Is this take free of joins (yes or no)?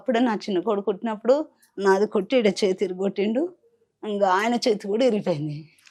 yes